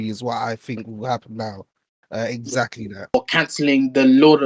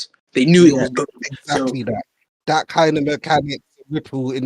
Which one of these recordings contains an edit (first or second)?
first